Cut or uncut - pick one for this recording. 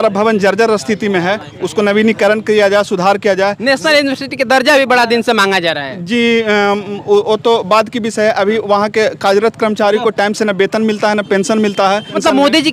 uncut